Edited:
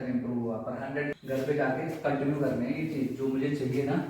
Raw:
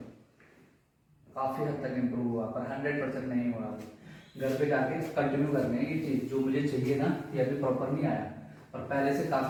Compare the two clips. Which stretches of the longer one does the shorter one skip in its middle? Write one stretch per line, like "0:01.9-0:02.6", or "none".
0:03.0-0:04.3